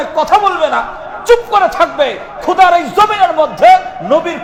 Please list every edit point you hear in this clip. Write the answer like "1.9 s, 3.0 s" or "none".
none

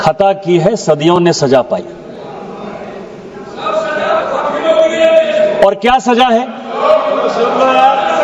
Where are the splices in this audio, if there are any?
none

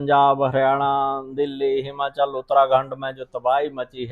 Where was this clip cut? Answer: none

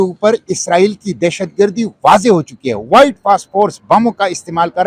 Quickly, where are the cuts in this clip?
none

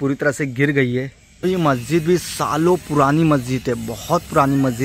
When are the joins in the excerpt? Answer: 1.2 s

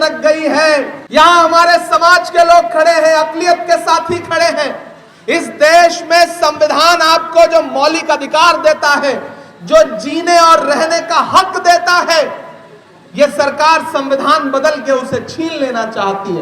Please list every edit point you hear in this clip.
1.0 s

